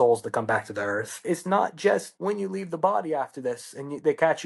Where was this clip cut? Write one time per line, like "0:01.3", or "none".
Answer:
0:01.2
0:02.1